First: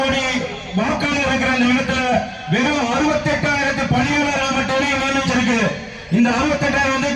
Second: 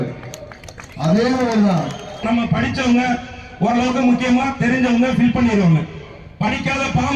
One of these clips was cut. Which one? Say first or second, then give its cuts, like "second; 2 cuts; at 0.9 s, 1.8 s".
second; 1 cut; at 2.2 s